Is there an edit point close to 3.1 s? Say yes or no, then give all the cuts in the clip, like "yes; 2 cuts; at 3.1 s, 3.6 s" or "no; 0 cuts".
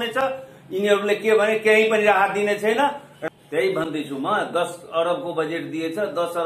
yes; 1 cut; at 3.1 s